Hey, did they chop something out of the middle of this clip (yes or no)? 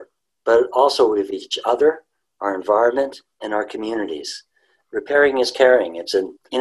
no